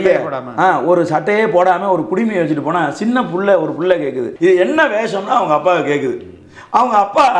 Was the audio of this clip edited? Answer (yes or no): yes